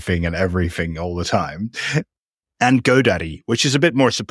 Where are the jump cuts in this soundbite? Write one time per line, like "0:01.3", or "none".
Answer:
0:02.1